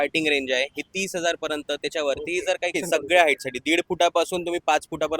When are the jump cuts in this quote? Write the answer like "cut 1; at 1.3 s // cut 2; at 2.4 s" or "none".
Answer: cut 1; at 2.7 s